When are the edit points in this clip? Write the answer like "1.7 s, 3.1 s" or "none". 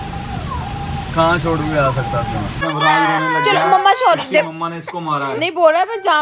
2.6 s